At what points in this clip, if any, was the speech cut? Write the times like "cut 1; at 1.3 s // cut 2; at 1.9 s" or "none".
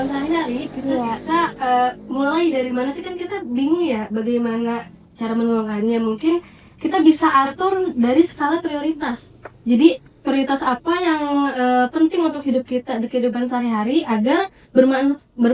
none